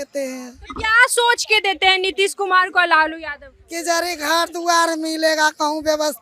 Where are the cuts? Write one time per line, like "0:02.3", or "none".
none